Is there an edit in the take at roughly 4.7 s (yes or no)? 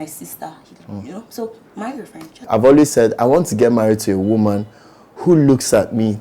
no